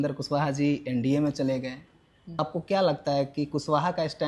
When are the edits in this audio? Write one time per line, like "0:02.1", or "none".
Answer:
0:02.4